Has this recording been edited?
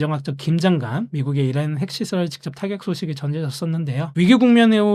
no; 0 cuts

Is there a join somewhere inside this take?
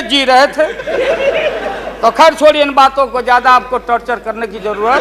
no; 0 cuts

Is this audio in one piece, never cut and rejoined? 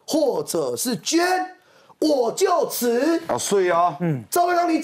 yes; 0 cuts

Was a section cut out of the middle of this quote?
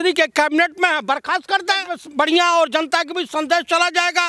yes; 1 cut; at 2.0 s

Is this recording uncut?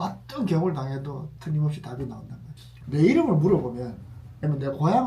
no; 1 cut; at 2.7 s

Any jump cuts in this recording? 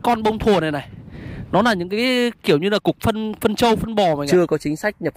yes; 1 cut; at 4.2 s

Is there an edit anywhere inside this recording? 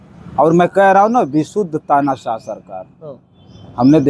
no; 0 cuts

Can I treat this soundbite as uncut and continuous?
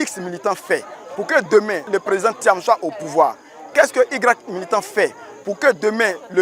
no; 1 cut; at 1.8 s

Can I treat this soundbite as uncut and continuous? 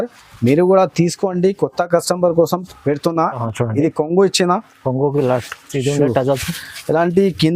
no; 1 cut; at 3.4 s

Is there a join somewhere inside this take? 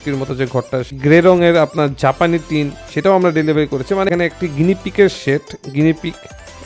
yes; 2 cuts; at 1.0 s, 4.1 s

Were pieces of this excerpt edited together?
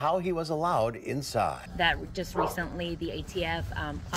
yes; 1 cut; at 1.6 s

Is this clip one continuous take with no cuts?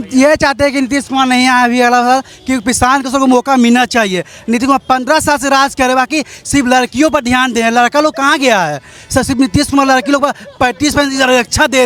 yes; 0 cuts

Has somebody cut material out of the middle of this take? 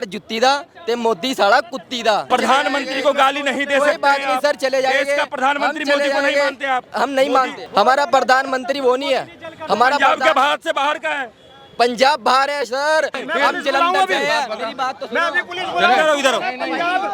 yes; 3 cuts; at 2.2 s, 7.6 s, 13.2 s

